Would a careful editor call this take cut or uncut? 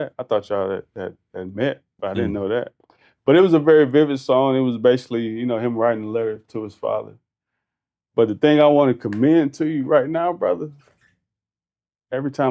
uncut